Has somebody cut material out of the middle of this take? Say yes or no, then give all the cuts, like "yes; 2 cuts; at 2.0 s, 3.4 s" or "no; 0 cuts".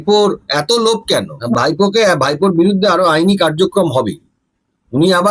yes; 1 cut; at 1.4 s